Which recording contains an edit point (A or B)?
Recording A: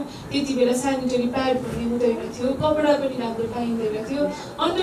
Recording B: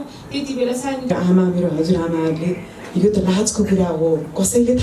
B